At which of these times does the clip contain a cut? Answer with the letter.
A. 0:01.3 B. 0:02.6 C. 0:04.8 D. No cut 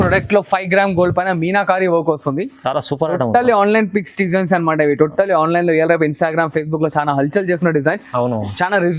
D